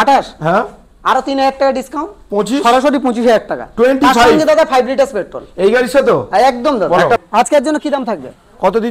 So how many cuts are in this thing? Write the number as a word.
one